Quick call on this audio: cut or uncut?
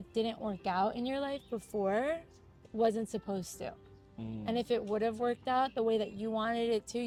uncut